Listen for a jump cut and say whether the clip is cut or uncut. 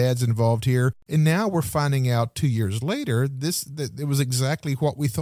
cut